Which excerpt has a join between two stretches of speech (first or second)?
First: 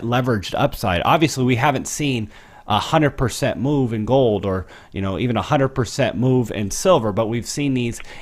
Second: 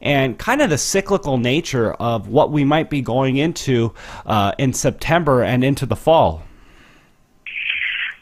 first